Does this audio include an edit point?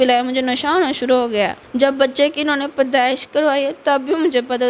yes; 1 cut; at 1.6 s

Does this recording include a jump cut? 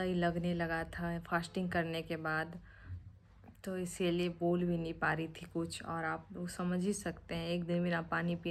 no; 0 cuts

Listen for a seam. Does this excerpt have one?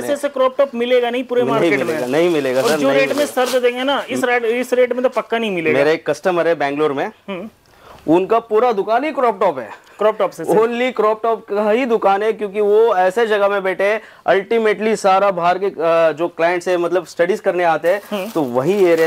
no; 0 cuts

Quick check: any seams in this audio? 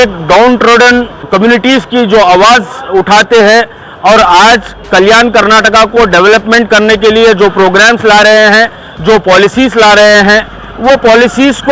yes; 1 cut; at 1.3 s

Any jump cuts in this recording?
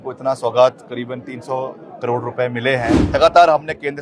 yes; 1 cut; at 3.0 s

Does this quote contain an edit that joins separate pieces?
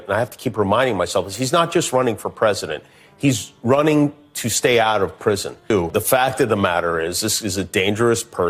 yes; 1 cut; at 5.5 s

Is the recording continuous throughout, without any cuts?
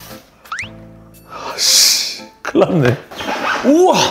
no; 1 cut; at 3.0 s

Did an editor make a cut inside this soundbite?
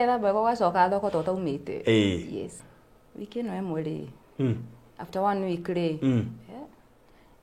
yes; 1 cut; at 2.6 s

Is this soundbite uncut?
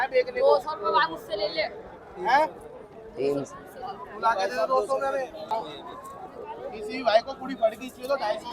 no; 1 cut; at 5.5 s

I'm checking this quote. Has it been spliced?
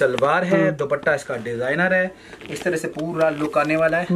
no; 0 cuts

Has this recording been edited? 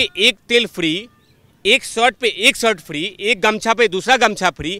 no; 0 cuts

